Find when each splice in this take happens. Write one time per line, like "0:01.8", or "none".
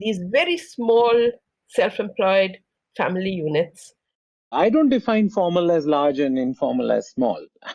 0:04.3